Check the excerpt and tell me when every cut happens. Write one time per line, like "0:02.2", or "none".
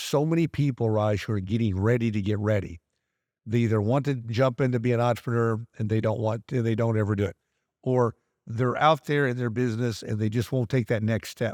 none